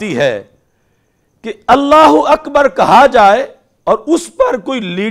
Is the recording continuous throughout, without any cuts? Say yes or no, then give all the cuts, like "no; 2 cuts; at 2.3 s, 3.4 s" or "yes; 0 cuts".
yes; 0 cuts